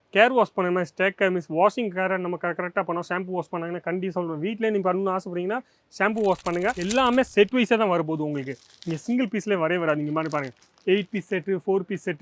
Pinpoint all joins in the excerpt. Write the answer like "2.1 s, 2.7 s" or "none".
6.8 s